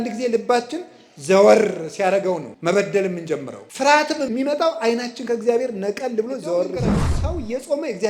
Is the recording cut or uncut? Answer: cut